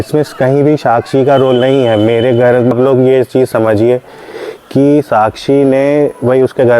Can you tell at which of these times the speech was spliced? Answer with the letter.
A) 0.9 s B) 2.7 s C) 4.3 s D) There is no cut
B